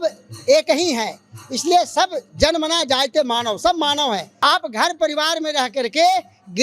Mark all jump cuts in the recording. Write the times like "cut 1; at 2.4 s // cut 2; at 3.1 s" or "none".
cut 1; at 4.3 s